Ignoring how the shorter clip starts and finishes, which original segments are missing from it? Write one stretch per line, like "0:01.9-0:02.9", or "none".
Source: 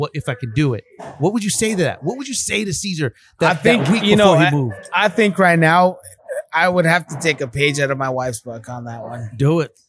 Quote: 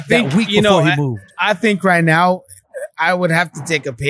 none